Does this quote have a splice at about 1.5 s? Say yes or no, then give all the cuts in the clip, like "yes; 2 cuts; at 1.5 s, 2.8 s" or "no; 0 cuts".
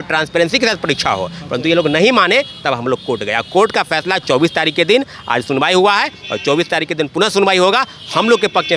no; 0 cuts